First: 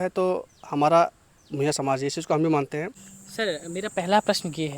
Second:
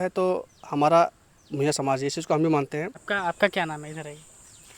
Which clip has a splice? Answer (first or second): first